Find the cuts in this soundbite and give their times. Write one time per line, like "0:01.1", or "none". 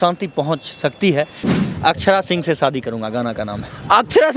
0:01.4